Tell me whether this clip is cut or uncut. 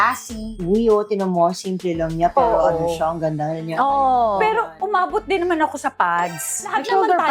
uncut